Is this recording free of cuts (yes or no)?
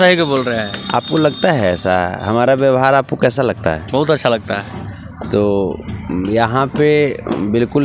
yes